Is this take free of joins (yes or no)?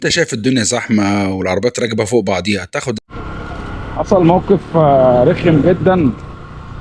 no